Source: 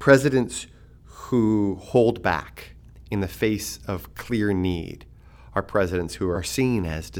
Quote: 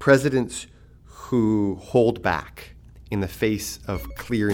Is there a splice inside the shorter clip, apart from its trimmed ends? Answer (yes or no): no